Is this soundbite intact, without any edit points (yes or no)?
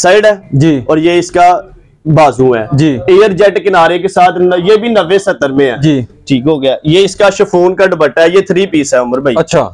yes